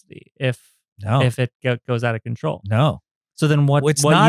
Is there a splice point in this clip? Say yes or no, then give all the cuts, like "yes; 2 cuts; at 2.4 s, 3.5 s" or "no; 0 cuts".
no; 0 cuts